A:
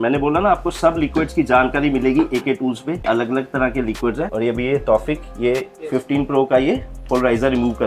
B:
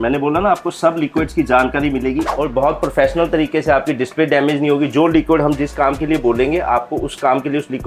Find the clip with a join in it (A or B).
B